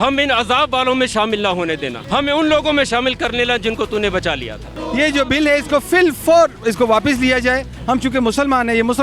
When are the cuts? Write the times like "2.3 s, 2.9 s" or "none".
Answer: 1.9 s, 4.8 s, 7.7 s

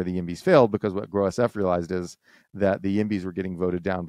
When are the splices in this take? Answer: none

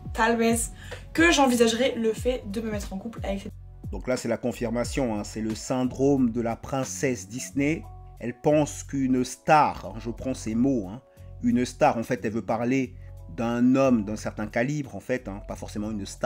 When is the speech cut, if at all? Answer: none

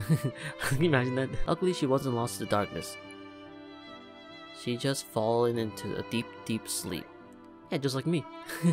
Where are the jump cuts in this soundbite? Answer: none

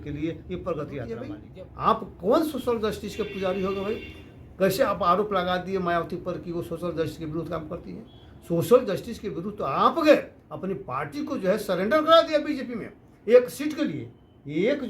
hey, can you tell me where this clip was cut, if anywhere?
1.4 s

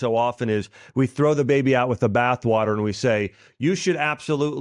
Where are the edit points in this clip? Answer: none

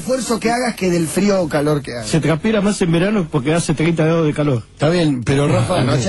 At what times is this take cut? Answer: none

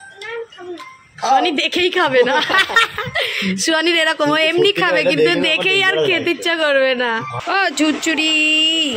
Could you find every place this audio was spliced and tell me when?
7.4 s

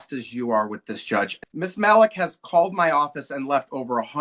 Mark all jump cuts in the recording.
1.4 s

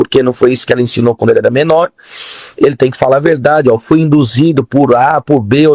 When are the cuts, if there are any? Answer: 1.9 s

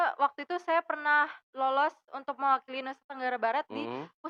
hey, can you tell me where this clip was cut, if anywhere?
none

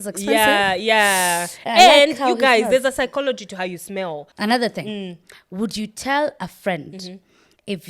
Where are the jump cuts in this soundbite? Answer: 4.2 s

